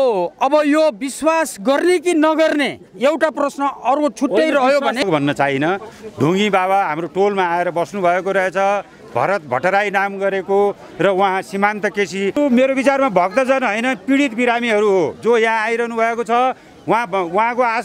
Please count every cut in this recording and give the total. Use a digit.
2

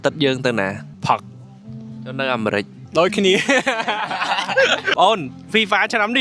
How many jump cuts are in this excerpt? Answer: 3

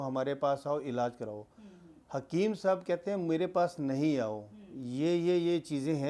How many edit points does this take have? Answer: 0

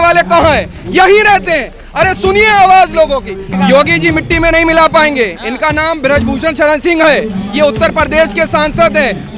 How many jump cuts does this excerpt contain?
1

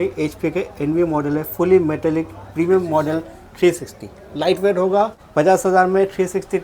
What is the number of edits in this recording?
1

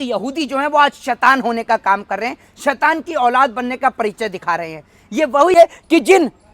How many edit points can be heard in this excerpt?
1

